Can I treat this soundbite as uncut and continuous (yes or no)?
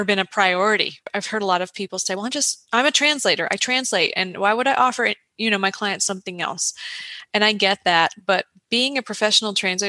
no